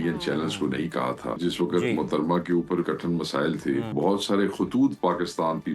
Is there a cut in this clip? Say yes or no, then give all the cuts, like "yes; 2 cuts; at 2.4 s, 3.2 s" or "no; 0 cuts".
yes; 3 cuts; at 1.4 s, 2.8 s, 3.9 s